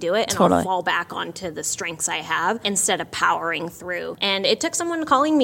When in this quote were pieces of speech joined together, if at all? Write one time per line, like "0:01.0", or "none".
0:02.6
0:04.1